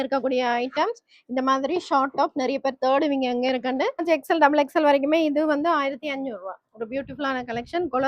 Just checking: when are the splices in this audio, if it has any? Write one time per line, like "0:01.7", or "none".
0:04.0